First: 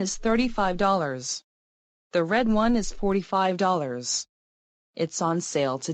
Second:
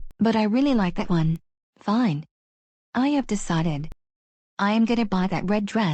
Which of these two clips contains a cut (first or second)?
second